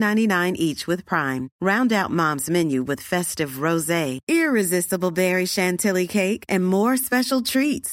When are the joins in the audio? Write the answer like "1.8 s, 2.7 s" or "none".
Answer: none